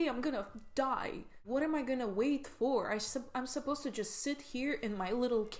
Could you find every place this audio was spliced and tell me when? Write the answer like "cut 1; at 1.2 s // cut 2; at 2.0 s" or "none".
cut 1; at 1.4 s